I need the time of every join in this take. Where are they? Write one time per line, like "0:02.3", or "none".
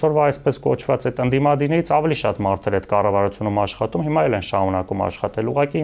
none